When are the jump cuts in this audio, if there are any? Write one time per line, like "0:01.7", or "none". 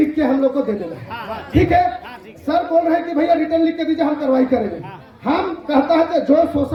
none

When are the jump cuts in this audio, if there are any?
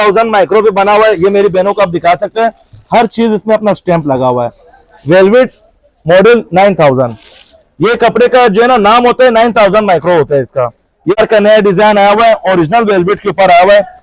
0:11.2

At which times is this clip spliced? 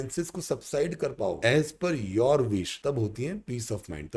0:01.4
0:02.7

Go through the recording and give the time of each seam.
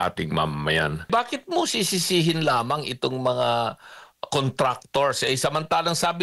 0:01.1

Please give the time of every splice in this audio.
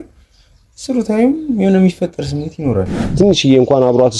0:03.1

